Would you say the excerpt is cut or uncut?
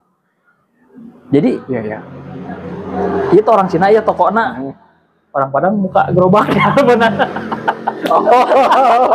uncut